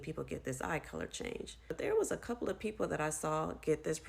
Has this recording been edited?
yes; 1 cut; at 1.7 s

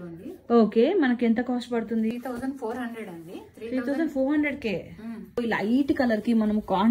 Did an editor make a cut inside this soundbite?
yes; 2 cuts; at 2.1 s, 5.4 s

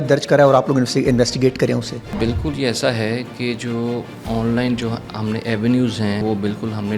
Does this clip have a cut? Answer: yes; 2 cuts; at 2.2 s, 6.2 s

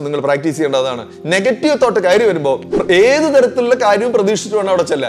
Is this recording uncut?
no; 1 cut; at 2.7 s

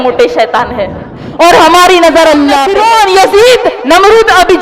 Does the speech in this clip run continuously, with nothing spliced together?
no; 1 cut; at 2.7 s

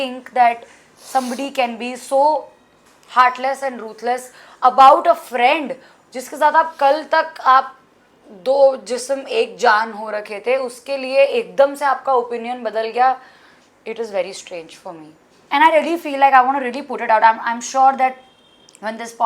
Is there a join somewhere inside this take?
no; 0 cuts

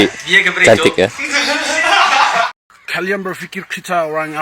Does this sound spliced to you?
yes; 1 cut; at 2.5 s

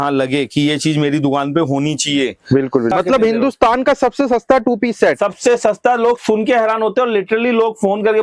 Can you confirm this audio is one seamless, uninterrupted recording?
no; 1 cut; at 2.9 s

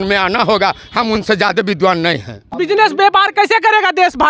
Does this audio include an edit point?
yes; 1 cut; at 2.4 s

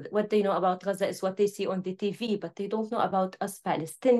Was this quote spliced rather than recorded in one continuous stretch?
no; 0 cuts

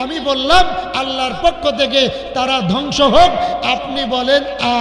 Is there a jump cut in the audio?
no; 0 cuts

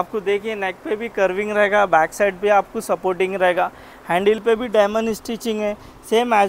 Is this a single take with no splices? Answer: yes; 0 cuts

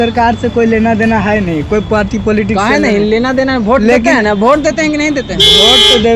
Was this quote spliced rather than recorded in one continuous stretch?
no; 0 cuts

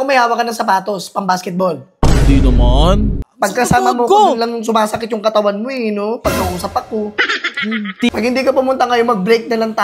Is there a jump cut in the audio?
yes; 2 cuts; at 3.2 s, 8.1 s

